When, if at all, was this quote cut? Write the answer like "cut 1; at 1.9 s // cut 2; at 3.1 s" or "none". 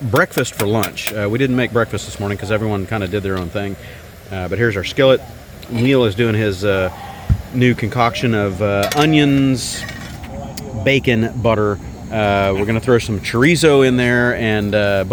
none